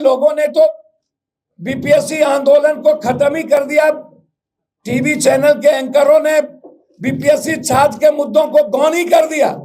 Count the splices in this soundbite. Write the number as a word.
zero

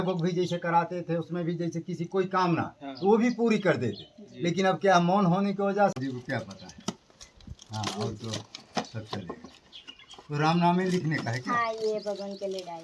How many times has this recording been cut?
one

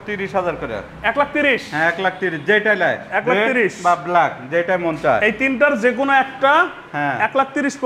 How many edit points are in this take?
zero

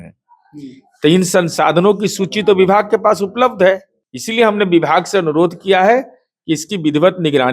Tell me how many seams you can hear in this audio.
one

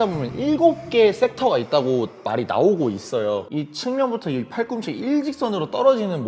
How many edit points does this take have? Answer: one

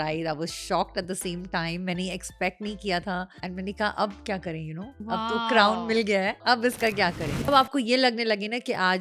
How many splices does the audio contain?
four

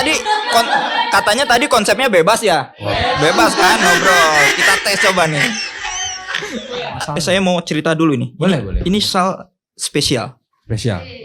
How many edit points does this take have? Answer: one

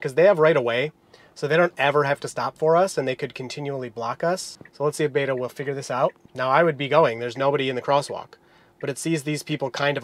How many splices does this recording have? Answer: two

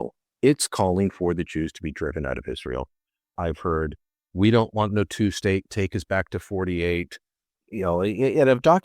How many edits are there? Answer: one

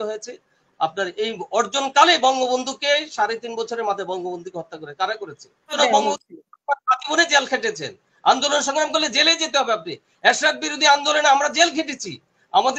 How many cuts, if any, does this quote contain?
one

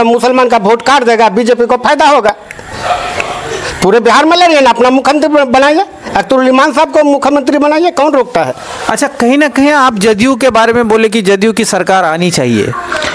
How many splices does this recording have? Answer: zero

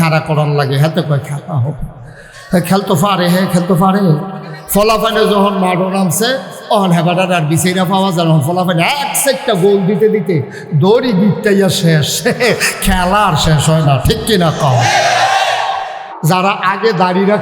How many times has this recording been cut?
one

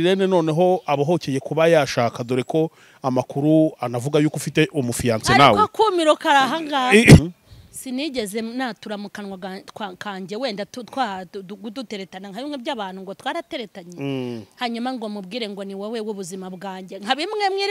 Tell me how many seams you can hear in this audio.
one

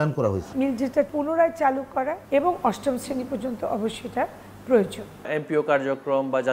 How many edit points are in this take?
three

